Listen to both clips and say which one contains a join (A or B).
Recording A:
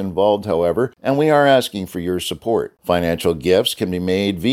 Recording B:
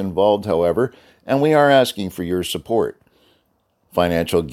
A